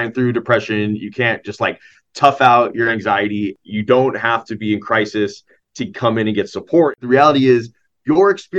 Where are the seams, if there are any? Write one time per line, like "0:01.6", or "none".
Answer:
0:03.6
0:06.9